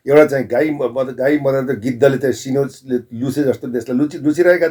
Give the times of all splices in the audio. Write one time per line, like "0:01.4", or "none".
none